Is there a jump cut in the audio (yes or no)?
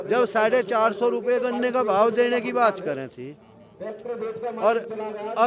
no